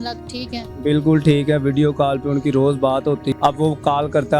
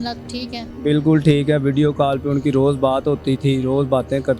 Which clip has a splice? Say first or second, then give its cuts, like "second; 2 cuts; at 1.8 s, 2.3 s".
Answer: first; 1 cut; at 3.4 s